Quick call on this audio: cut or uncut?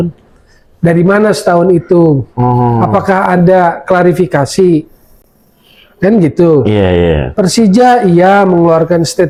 uncut